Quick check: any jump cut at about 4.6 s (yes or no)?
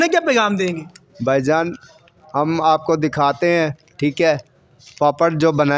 no